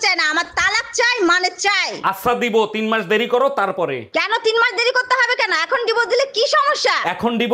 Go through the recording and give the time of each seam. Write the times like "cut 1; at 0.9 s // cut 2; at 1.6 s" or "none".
none